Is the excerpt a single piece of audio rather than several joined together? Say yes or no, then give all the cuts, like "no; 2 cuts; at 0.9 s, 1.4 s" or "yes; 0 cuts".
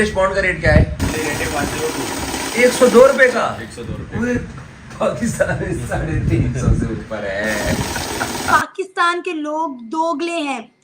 no; 2 cuts; at 1.0 s, 8.5 s